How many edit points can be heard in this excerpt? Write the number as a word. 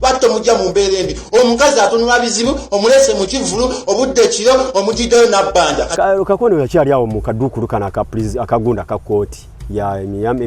one